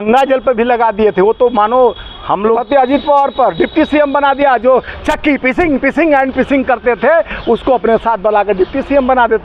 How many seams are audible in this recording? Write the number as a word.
one